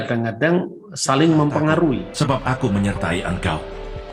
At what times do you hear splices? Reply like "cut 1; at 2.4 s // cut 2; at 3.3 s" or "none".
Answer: cut 1; at 2.1 s